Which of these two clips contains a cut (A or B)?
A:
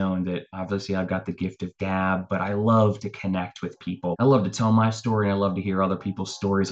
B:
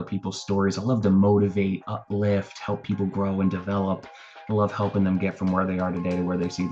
A